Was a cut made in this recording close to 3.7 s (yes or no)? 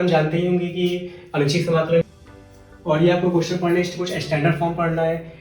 no